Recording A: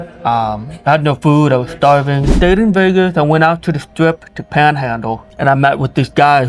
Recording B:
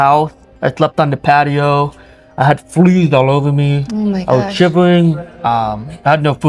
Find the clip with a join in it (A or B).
A